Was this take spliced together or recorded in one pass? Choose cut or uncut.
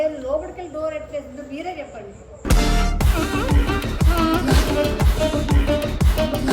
uncut